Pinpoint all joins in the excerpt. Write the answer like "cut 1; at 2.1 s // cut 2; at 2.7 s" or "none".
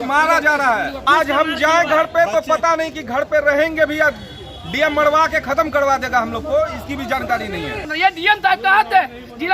cut 1; at 1.0 s // cut 2; at 7.9 s